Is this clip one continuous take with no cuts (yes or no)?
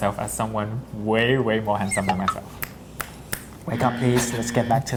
yes